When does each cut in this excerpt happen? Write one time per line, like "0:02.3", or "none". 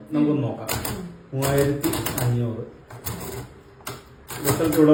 none